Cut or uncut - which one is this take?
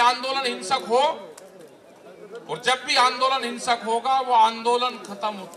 uncut